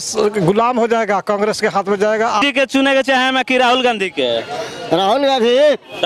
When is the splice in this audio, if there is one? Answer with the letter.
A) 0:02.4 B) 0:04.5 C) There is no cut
A